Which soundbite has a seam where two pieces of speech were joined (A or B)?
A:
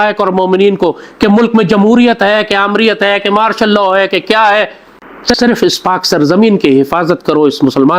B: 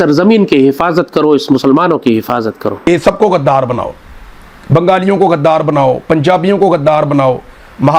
B